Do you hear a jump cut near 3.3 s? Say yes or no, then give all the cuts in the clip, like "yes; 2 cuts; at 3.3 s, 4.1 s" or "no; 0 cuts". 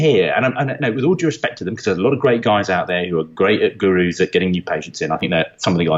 no; 0 cuts